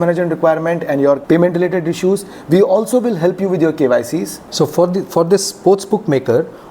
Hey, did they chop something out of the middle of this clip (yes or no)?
yes